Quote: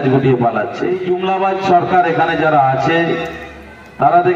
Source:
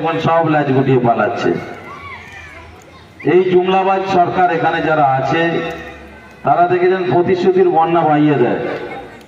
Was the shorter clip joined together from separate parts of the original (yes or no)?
yes